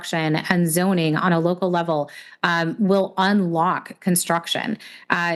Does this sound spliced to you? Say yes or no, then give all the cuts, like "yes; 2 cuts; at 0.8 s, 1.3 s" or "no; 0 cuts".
no; 0 cuts